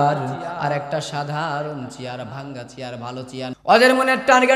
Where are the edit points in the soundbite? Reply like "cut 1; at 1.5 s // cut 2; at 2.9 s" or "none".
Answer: cut 1; at 3.5 s